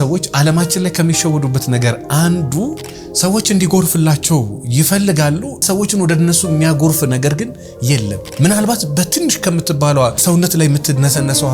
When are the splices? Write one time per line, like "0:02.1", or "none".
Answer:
0:05.6
0:08.2
0:10.2